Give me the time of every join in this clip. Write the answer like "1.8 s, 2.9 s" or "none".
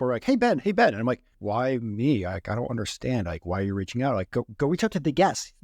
1.3 s